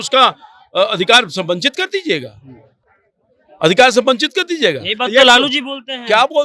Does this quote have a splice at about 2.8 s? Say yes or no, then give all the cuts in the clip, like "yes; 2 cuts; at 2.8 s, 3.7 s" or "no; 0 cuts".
no; 0 cuts